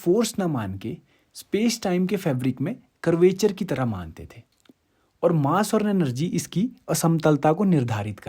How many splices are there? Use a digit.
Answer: 1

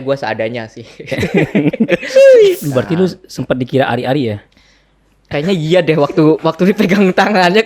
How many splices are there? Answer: 1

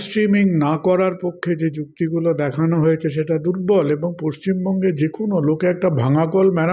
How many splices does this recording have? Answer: 0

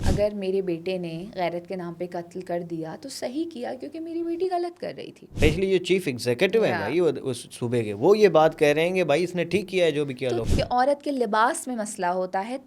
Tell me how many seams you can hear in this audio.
2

